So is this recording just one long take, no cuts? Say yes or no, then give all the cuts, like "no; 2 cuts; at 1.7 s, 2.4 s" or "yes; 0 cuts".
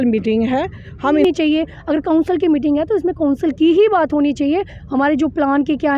no; 1 cut; at 1.2 s